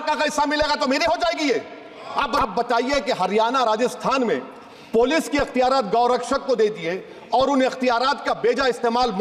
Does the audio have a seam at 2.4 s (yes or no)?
yes